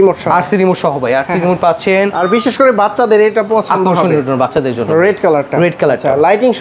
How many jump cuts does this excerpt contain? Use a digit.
1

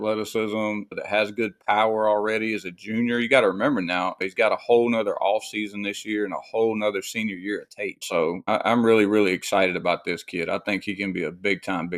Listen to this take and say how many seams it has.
3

